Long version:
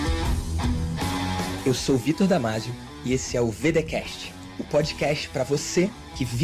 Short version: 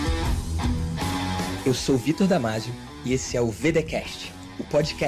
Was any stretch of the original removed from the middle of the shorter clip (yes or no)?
no